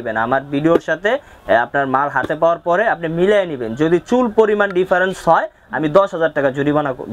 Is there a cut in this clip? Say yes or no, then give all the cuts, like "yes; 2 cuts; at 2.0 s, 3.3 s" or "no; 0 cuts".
no; 0 cuts